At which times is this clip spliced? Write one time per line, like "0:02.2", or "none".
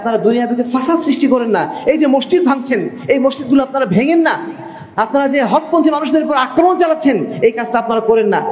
none

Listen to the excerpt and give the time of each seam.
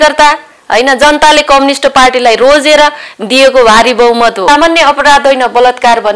0:04.4

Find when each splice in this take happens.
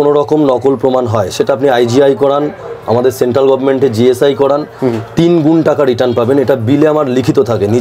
none

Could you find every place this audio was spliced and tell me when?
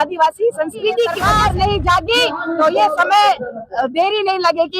0:01.2

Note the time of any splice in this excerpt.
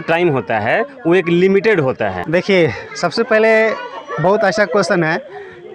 0:02.2

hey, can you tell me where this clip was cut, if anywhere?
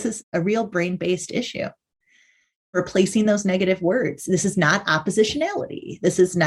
0:02.7

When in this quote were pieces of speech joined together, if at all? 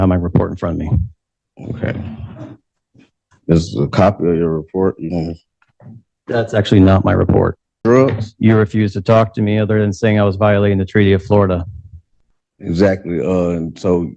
0:07.8

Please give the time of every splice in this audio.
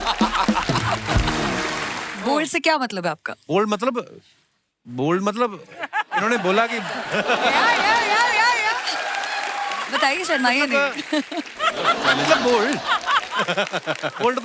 0:02.0

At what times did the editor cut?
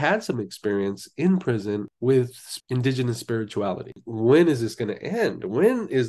0:03.9

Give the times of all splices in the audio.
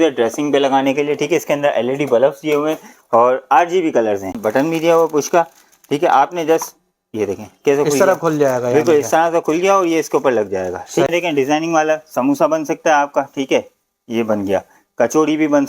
0:04.4
0:11.1

